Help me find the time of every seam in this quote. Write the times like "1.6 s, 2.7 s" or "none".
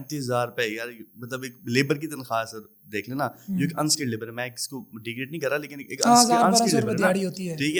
none